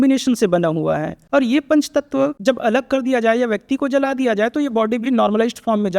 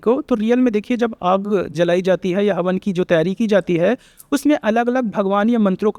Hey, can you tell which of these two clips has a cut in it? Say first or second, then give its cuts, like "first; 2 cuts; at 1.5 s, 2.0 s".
first; 2 cuts; at 1.1 s, 2.4 s